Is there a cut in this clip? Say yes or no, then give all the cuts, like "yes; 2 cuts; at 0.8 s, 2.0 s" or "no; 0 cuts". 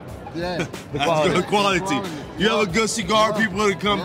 no; 0 cuts